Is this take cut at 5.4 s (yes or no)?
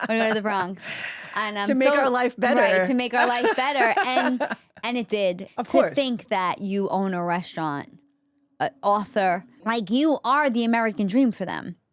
yes